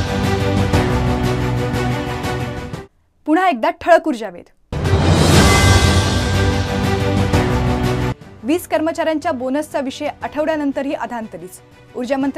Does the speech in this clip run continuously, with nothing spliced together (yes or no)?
yes